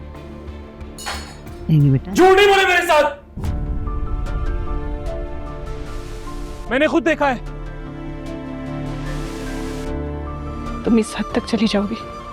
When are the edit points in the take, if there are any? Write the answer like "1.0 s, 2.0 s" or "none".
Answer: 10.8 s